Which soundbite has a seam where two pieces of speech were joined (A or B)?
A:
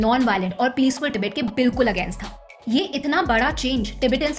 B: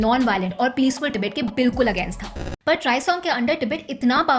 B